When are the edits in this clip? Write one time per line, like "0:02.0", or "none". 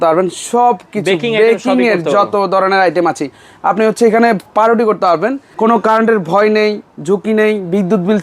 0:05.4

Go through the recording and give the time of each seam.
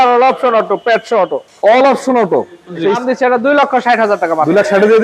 0:03.0

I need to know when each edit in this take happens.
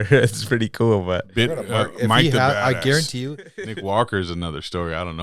0:03.6

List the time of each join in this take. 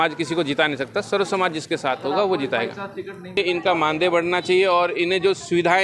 0:03.4

